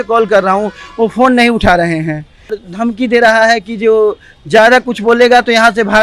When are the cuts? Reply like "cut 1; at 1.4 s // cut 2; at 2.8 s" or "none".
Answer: cut 1; at 2.6 s

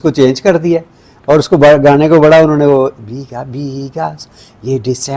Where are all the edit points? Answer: none

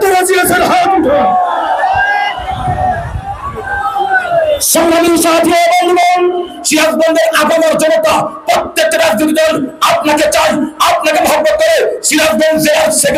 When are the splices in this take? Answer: none

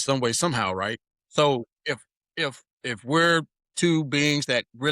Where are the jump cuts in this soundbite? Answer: cut 1; at 1.1 s // cut 2; at 2.7 s // cut 3; at 3.6 s

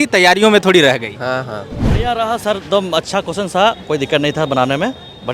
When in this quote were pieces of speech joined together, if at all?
cut 1; at 1.9 s

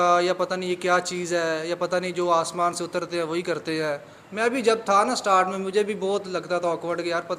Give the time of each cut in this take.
none

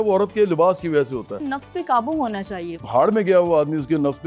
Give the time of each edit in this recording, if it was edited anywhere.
cut 1; at 1.3 s // cut 2; at 2.8 s

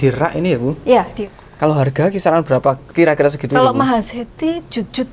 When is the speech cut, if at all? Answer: cut 1; at 1.2 s

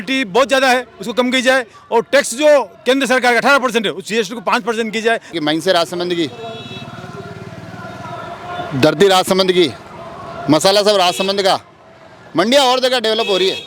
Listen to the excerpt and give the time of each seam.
cut 1; at 5.3 s

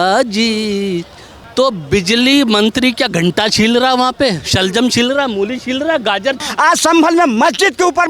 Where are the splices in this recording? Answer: cut 1; at 1.3 s // cut 2; at 6.4 s

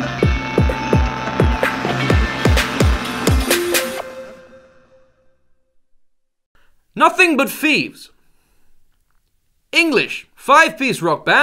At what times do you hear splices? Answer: none

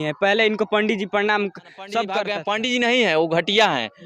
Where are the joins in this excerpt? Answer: cut 1; at 2.3 s

